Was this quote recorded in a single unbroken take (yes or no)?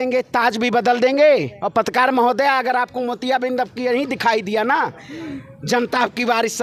yes